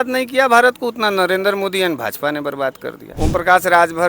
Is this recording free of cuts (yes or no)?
no